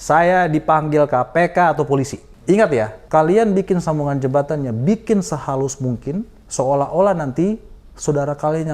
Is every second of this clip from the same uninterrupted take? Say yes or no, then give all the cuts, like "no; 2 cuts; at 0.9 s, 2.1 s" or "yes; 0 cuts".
no; 3 cuts; at 2.2 s, 3.0 s, 6.4 s